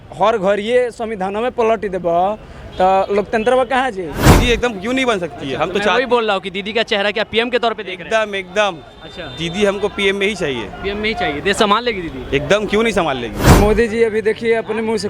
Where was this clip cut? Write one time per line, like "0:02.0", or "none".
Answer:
0:04.2
0:13.4